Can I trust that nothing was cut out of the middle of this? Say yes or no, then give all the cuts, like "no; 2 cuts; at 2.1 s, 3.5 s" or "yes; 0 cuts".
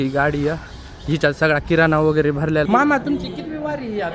no; 1 cut; at 2.7 s